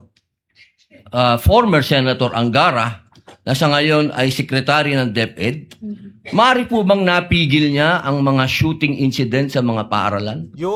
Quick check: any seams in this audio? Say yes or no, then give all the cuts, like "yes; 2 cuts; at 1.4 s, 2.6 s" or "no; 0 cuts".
no; 0 cuts